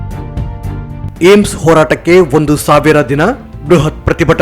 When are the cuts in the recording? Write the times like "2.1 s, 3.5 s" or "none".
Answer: 1.0 s